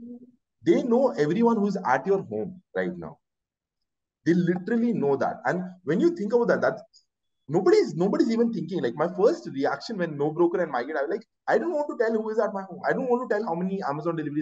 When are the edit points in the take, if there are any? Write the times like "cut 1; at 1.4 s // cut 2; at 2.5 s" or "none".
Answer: none